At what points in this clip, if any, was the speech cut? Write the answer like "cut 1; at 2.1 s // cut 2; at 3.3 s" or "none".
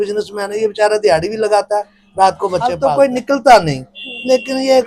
cut 1; at 2.8 s